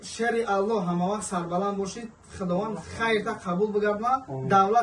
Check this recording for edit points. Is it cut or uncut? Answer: uncut